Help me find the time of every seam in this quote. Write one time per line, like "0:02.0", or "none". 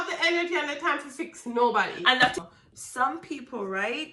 0:02.4